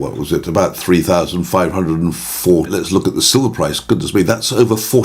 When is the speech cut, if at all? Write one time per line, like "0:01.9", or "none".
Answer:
0:02.7

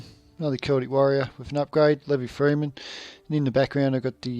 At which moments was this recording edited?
0:03.2

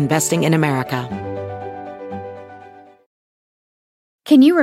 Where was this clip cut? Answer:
0:01.0

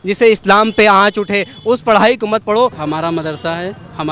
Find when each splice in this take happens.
0:02.8

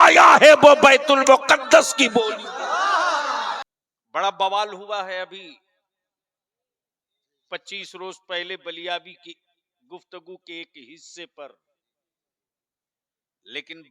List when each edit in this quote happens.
0:03.8

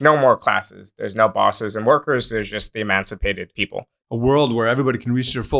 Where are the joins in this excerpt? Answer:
0:03.8

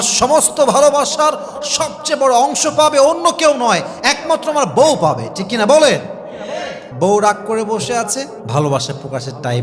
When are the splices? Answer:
0:06.8

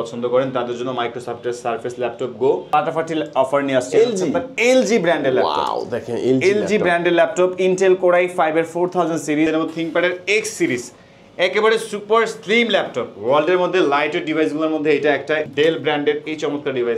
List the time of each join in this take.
0:02.7
0:09.5
0:15.5

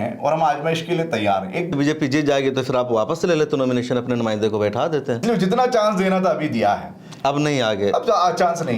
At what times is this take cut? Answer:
0:01.7
0:05.2

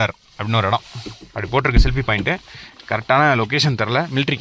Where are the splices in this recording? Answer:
none

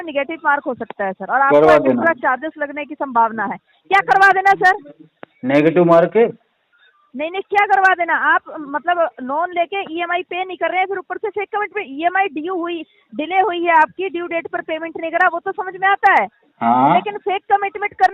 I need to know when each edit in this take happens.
none

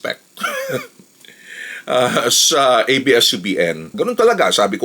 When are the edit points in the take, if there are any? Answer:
0:03.9

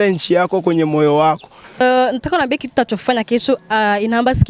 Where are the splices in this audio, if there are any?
0:01.8

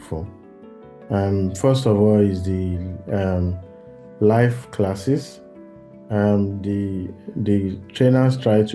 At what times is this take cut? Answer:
none

